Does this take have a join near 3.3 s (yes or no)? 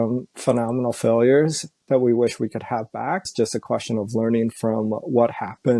yes